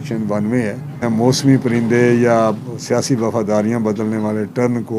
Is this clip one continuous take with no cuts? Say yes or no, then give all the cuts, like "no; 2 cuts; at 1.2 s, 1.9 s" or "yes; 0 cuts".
no; 1 cut; at 1.0 s